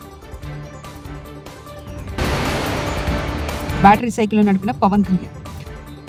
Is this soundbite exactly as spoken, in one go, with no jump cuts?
yes; 0 cuts

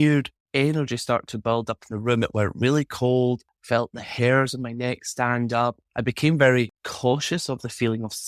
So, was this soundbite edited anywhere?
yes; 3 cuts; at 3.5 s, 5.9 s, 6.8 s

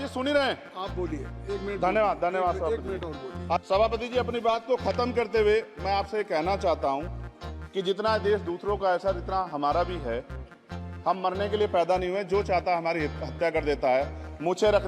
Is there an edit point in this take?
yes; 1 cut; at 3.6 s

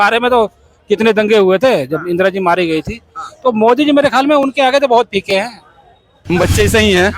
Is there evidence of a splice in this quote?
yes; 1 cut; at 6.1 s

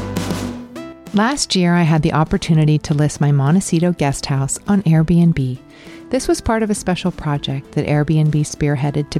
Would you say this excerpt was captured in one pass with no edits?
no; 1 cut; at 1.0 s

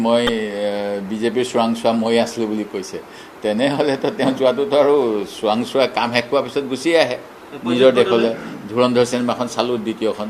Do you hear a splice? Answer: no; 0 cuts

